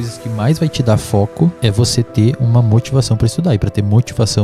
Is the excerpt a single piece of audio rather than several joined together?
no; 1 cut; at 1.6 s

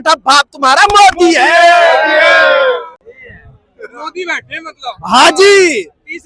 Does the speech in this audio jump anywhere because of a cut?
no; 0 cuts

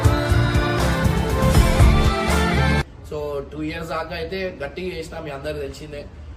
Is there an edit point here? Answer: no; 0 cuts

